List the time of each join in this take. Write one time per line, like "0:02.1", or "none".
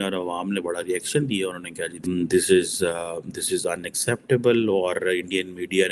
0:02.0